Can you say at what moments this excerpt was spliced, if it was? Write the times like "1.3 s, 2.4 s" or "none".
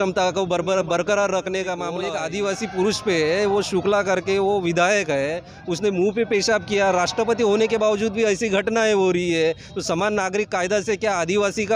2.1 s